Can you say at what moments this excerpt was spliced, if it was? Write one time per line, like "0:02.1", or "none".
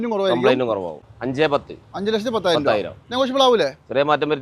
0:01.1